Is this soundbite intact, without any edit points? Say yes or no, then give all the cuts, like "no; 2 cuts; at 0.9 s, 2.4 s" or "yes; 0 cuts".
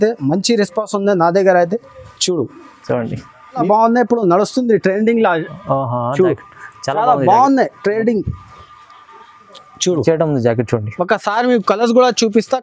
no; 1 cut; at 3.6 s